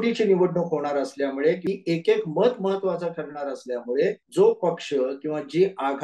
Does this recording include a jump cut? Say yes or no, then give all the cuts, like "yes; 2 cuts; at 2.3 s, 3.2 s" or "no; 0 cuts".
yes; 2 cuts; at 1.6 s, 4.2 s